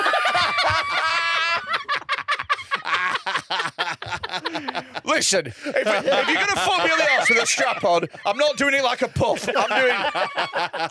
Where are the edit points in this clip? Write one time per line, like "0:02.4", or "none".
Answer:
none